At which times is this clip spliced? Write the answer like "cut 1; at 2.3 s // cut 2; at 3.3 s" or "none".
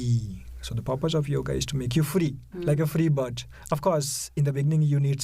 cut 1; at 2.5 s